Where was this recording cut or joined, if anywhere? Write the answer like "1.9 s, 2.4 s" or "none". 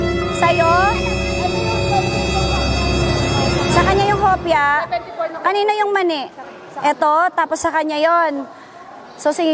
none